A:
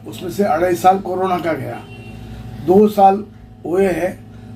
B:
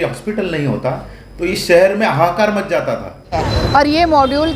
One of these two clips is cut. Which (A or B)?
B